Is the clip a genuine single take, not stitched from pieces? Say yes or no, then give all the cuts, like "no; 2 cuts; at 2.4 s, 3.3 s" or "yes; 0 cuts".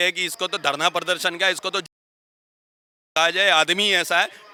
yes; 0 cuts